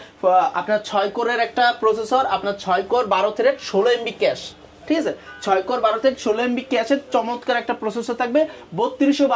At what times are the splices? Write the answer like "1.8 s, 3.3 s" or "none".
none